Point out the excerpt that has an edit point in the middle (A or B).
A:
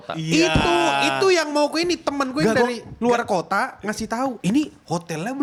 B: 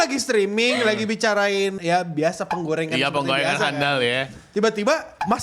B